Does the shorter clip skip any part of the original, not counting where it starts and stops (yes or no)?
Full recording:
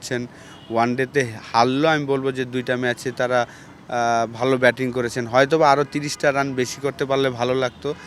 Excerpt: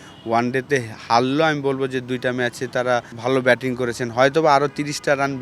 yes